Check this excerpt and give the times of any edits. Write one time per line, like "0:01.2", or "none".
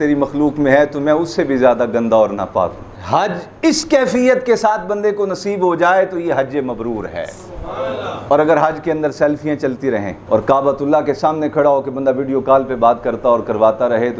0:02.9
0:08.2
0:10.1